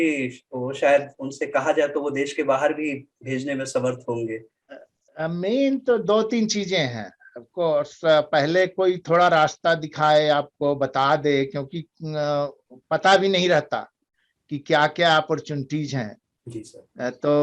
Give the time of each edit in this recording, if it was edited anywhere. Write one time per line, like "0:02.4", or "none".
0:04.6